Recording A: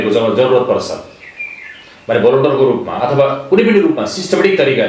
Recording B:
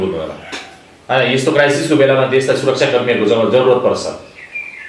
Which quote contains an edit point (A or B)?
B